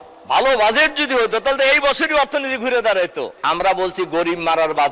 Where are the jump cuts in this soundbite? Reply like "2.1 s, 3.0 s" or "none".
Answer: 3.3 s